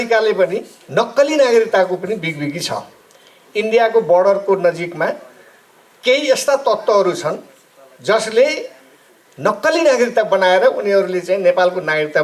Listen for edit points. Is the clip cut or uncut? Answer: uncut